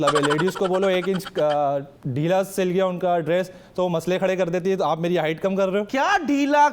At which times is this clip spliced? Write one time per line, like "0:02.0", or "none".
none